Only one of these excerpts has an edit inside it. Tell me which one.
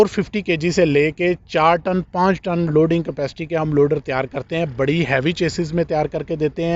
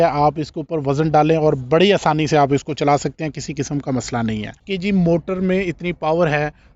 second; 1 cut; at 4.5 s

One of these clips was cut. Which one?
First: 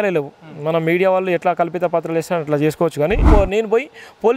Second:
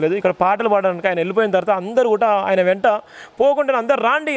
first; 1 cut; at 3.2 s

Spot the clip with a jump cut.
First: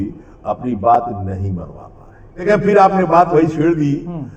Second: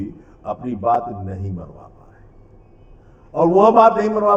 first; 1 cut; at 2.4 s

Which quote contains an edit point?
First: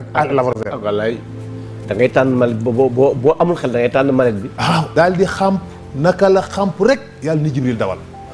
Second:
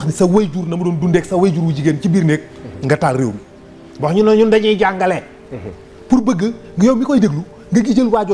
first; 1 cut; at 4.9 s

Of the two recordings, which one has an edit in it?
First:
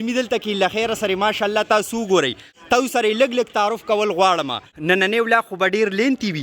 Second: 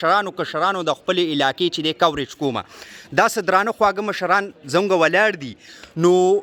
first; 2 cuts; at 2.5 s, 4.7 s

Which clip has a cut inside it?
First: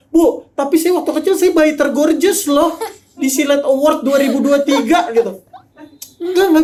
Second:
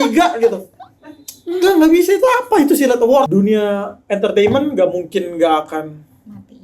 second; 1 cut; at 3.3 s

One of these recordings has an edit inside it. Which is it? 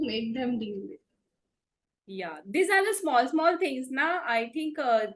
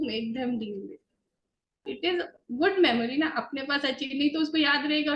second; 1 cut; at 1.8 s

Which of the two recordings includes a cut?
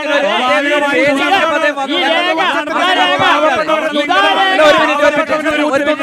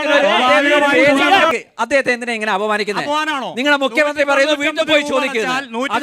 second; 1 cut; at 1.5 s

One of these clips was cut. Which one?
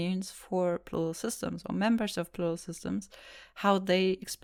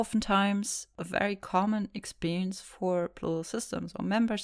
second; 1 cut; at 1.0 s

